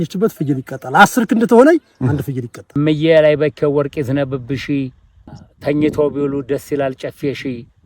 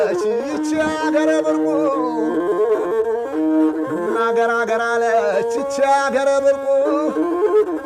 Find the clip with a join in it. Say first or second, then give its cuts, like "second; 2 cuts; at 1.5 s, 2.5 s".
first; 1 cut; at 2.6 s